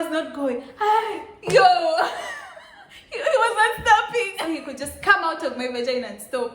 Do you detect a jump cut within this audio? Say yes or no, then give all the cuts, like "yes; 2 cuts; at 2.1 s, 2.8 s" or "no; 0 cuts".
yes; 1 cut; at 4.4 s